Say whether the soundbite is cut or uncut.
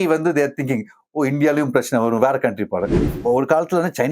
cut